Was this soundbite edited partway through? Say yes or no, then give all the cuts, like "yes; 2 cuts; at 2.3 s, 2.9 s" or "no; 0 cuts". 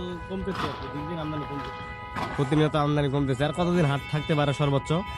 no; 0 cuts